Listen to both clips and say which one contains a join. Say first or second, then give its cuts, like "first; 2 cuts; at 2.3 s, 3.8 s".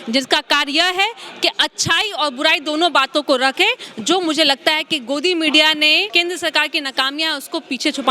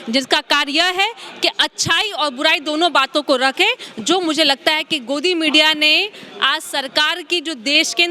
first; 1 cut; at 6.1 s